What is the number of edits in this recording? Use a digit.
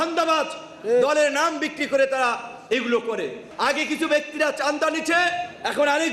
1